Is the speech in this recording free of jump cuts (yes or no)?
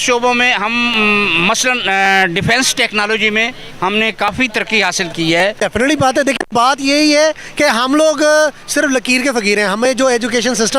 no